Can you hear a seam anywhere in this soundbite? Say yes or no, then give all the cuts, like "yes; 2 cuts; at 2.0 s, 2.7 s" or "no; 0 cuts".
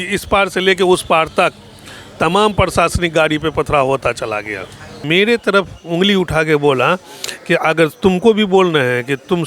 yes; 1 cut; at 5.0 s